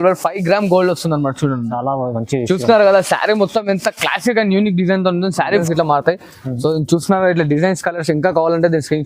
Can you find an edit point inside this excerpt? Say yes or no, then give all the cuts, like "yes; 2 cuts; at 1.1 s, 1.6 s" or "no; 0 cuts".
yes; 1 cut; at 5.6 s